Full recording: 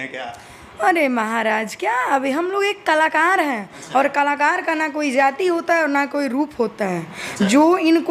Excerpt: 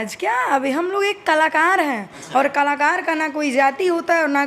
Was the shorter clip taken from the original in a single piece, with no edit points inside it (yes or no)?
yes